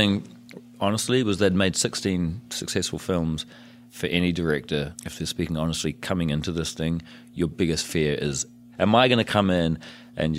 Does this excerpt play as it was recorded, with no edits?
no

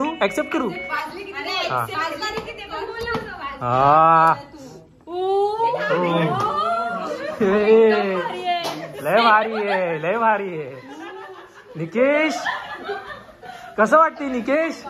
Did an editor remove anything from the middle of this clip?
no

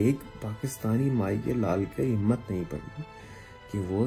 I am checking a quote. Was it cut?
no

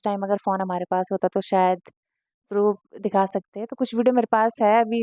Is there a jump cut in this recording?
no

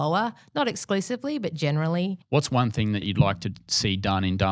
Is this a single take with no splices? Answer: no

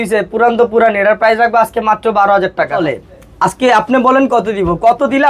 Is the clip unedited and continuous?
no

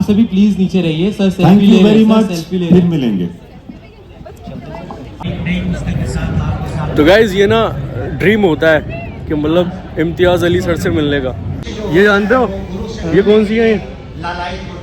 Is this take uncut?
no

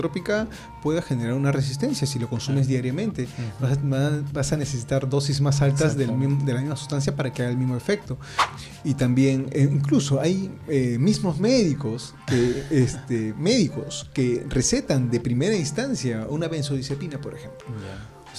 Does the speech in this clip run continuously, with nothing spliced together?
no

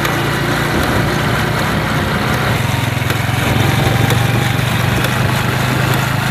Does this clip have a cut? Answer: no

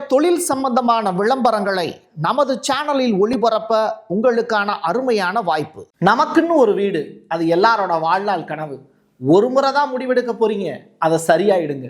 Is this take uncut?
no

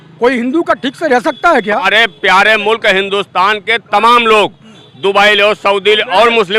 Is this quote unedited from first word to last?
no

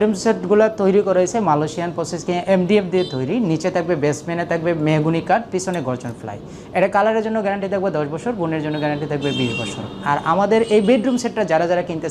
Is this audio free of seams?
yes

